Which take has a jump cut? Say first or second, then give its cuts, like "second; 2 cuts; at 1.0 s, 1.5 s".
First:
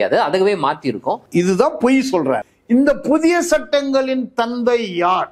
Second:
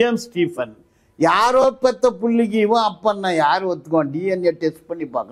first; 1 cut; at 2.5 s